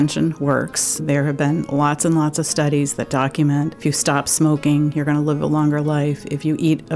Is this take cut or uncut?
cut